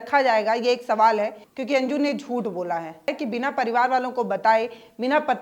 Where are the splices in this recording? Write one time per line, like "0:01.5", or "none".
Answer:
0:01.5
0:03.1